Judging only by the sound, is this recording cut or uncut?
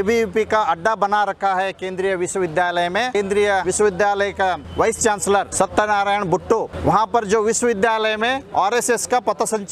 cut